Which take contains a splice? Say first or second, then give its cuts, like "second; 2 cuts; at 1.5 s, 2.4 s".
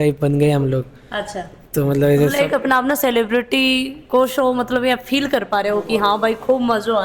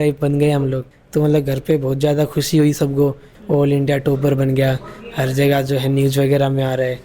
second; 2 cuts; at 0.9 s, 3.3 s